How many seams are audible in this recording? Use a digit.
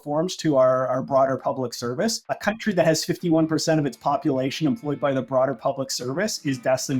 1